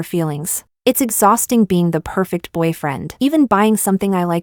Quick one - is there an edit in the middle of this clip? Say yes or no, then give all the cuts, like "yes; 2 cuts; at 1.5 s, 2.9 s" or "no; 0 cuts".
no; 0 cuts